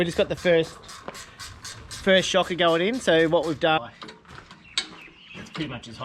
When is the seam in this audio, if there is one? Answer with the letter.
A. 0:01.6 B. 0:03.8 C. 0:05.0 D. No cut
B